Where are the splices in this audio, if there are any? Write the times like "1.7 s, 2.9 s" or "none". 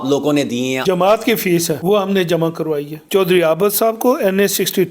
0.8 s, 1.8 s, 3.0 s